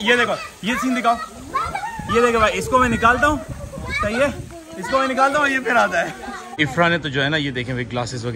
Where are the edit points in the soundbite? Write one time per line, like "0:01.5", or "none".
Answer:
0:06.5